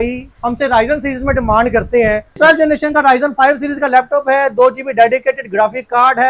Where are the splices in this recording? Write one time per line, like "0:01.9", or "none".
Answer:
0:02.3